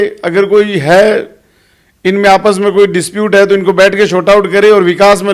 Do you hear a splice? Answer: no; 0 cuts

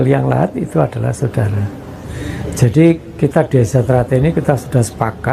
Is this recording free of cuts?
no; 1 cut; at 2.4 s

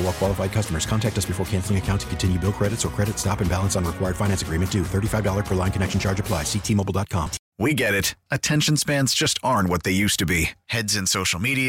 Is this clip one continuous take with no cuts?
no; 1 cut; at 7.4 s

